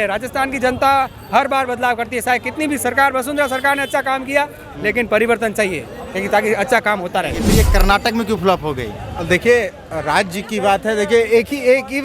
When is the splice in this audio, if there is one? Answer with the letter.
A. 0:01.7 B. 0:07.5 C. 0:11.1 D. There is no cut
B